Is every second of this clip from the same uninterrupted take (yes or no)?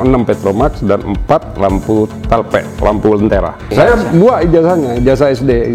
no